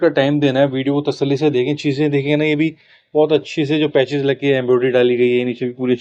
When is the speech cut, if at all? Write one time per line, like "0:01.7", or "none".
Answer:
none

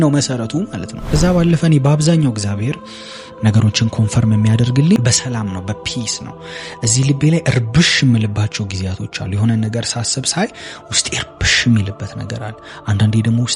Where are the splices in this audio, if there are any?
0:01.0
0:05.0

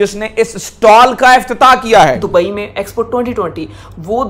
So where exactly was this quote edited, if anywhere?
0:02.2

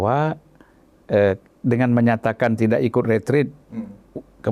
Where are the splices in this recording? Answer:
none

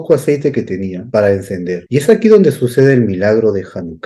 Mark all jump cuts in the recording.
0:01.0
0:01.8

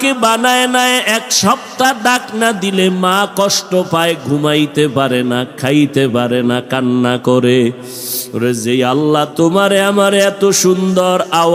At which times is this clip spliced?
none

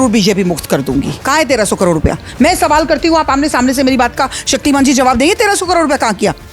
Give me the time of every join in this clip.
0:01.2

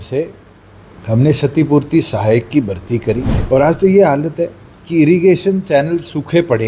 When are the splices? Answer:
0:03.3

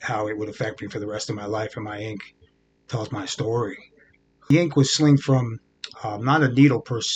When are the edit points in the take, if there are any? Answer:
0:04.5

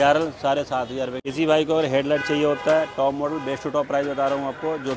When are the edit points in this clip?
0:01.2

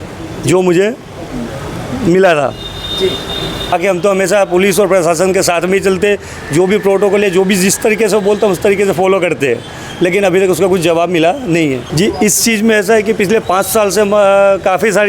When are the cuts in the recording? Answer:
0:03.7
0:11.8

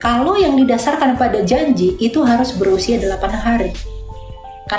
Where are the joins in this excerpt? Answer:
none

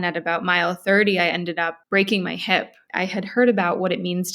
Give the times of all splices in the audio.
0:01.8
0:02.8

